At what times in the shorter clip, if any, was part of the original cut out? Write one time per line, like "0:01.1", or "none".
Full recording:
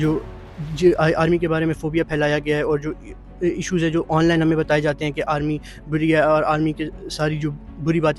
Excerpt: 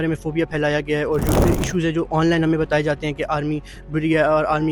0:01.3